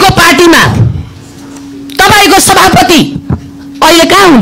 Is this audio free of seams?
yes; 0 cuts

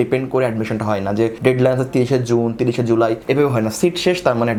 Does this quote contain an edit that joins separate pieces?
no; 0 cuts

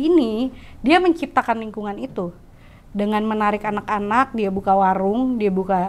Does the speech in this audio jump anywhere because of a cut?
no; 0 cuts

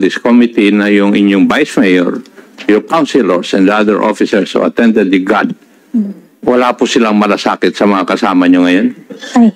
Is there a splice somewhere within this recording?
no; 0 cuts

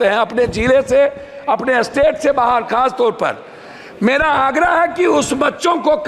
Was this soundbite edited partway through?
no; 0 cuts

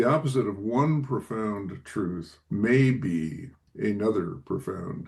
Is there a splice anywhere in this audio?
no; 0 cuts

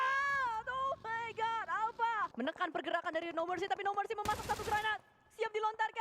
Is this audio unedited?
no; 1 cut; at 2.3 s

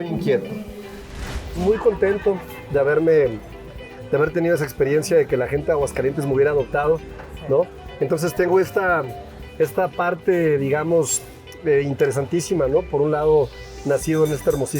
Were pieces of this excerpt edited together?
yes; 1 cut; at 1.3 s

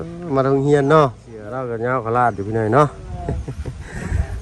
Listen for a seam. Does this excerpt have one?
yes; 1 cut; at 1.6 s

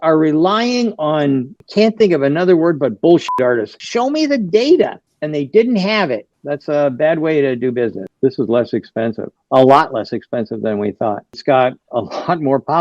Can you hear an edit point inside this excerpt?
yes; 4 cuts; at 3.8 s, 6.3 s, 8.1 s, 11.3 s

